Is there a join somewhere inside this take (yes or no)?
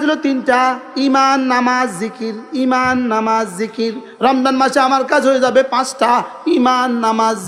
no